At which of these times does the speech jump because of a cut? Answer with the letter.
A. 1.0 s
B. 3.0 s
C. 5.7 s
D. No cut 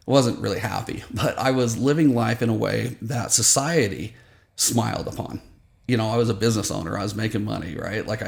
D